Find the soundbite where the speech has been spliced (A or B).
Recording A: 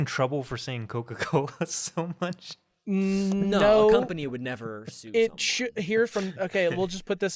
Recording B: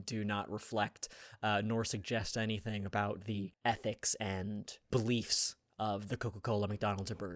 B